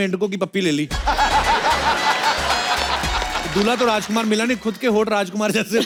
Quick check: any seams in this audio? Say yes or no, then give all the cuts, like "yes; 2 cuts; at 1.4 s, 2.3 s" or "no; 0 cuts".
no; 0 cuts